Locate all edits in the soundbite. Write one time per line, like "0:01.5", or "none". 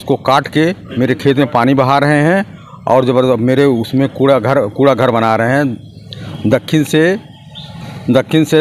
none